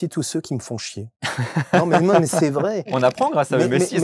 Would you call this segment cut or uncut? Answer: cut